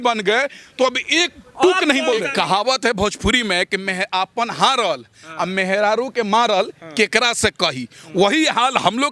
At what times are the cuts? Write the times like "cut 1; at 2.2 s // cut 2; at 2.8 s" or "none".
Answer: cut 1; at 2.3 s